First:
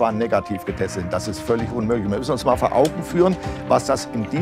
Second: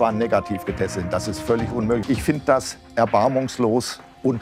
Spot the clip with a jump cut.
second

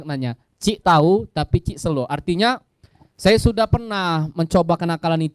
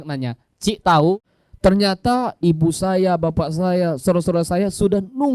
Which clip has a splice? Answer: second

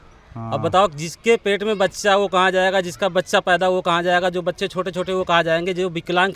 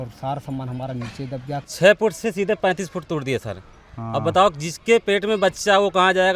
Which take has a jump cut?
second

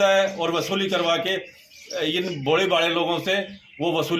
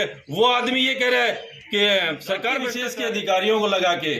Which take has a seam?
second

